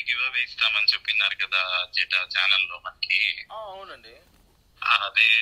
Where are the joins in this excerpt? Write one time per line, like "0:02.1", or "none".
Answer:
none